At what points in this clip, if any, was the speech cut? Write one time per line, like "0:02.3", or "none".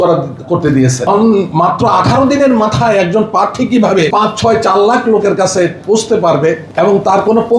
0:01.1
0:04.1
0:06.6